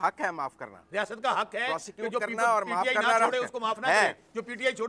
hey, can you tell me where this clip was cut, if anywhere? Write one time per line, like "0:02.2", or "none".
none